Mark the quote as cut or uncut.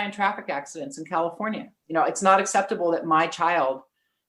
cut